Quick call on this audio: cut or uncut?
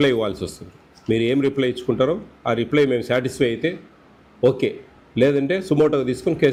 uncut